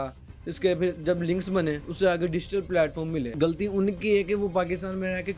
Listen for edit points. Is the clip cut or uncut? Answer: cut